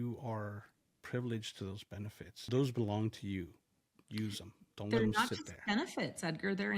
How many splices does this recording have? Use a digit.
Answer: 2